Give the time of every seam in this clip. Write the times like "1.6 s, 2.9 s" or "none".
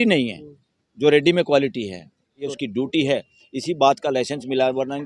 2.5 s